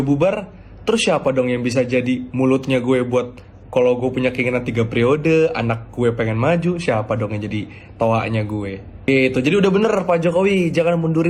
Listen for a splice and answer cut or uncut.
uncut